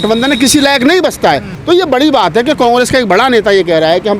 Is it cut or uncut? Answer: cut